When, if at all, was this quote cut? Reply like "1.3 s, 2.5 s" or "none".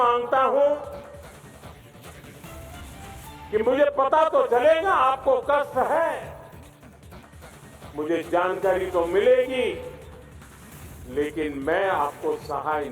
1.3 s, 3.2 s